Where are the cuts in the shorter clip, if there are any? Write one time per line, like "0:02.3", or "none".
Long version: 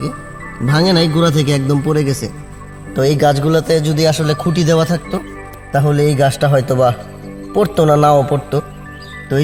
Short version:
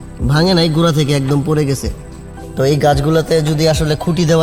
none